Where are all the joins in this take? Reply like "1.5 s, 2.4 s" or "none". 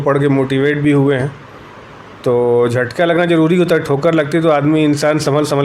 none

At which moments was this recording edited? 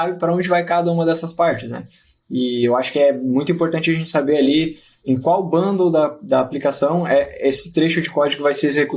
4.9 s

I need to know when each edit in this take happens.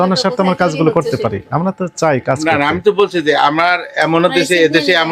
none

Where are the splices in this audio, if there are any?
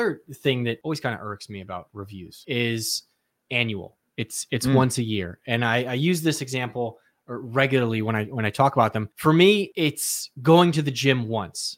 0.8 s, 2.4 s, 9.1 s, 9.7 s

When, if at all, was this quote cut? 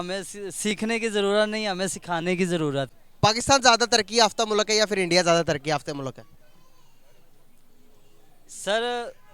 3.0 s

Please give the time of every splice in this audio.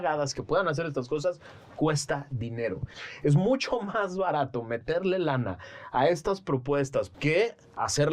3.0 s, 7.1 s

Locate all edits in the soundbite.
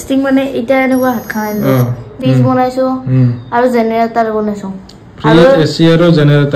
2.1 s

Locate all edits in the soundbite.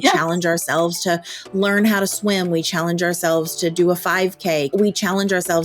4.7 s

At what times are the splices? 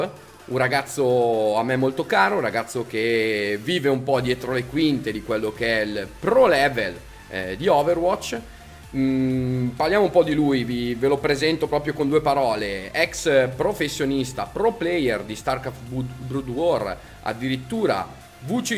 none

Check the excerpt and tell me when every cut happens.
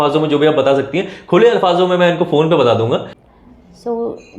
3.1 s

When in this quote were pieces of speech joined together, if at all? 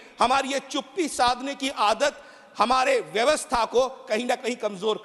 none

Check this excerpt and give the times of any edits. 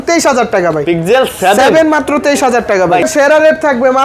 3.1 s

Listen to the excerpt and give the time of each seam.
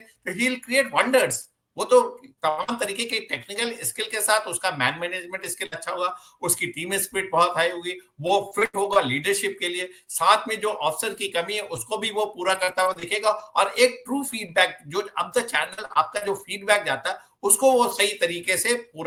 none

